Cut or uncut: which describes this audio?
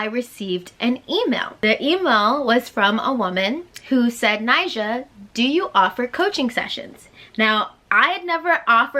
cut